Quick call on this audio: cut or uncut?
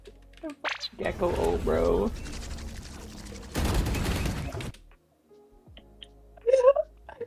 uncut